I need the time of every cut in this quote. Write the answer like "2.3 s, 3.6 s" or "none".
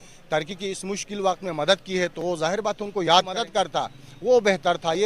3.4 s